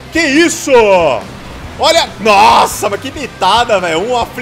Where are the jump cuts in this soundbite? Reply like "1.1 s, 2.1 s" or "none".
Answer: none